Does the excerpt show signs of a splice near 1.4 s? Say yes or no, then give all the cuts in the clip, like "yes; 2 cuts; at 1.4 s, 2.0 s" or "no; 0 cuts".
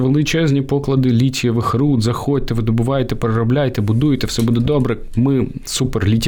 no; 0 cuts